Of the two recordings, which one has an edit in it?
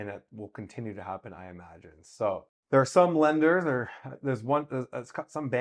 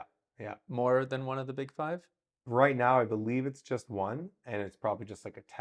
first; 1 cut; at 2.5 s

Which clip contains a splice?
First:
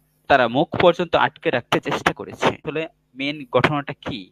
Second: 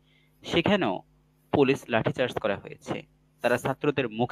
first; 1 cut; at 2.7 s

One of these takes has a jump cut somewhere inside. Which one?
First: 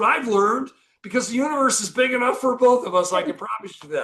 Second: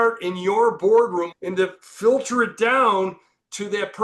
second; 1 cut; at 1.3 s

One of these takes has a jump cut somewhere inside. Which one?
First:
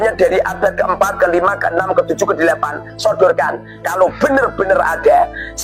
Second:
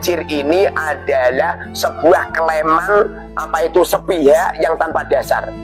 first; 1 cut; at 2.9 s

